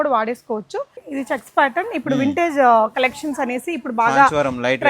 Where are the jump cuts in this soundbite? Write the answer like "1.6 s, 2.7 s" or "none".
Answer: 1.0 s